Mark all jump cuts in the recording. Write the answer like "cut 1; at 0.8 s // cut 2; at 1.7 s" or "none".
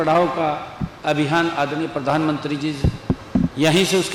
none